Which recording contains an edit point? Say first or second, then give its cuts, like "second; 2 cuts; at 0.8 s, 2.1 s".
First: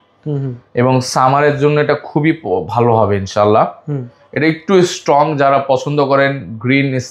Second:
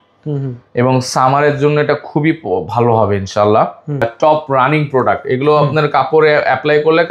second; 1 cut; at 4.1 s